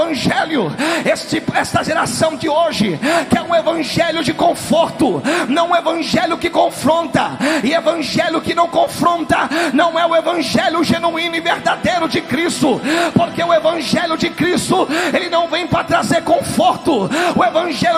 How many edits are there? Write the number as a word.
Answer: zero